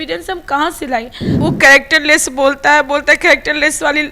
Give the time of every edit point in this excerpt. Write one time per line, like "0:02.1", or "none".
0:01.2